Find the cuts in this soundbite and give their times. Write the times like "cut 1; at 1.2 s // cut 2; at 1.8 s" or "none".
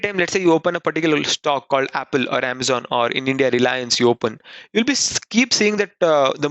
none